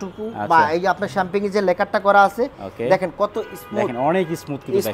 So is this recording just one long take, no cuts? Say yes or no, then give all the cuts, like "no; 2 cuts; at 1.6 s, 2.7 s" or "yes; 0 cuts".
yes; 0 cuts